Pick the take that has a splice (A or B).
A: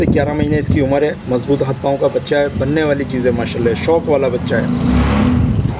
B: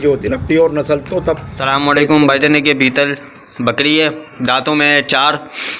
B